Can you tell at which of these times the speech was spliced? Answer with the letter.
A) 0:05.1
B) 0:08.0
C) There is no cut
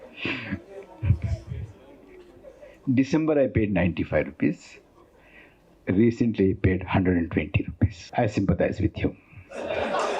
B